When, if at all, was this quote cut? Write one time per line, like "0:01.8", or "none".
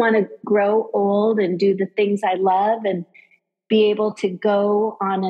none